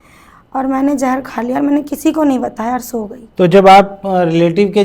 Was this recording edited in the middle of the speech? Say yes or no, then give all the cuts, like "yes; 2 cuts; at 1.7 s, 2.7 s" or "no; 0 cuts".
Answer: yes; 1 cut; at 3.2 s